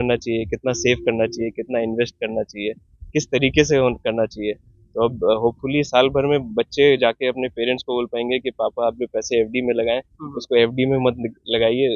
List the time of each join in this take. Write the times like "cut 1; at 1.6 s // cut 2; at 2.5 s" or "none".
none